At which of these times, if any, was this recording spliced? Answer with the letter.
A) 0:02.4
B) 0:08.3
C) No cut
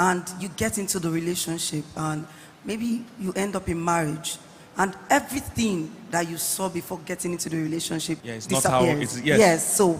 B